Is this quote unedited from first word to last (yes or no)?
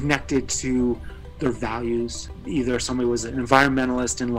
no